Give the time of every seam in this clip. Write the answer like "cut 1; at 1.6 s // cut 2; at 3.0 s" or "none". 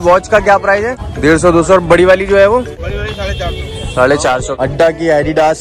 cut 1; at 1.0 s // cut 2; at 2.8 s // cut 3; at 4.5 s